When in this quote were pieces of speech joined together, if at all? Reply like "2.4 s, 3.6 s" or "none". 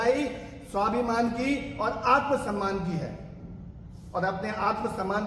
none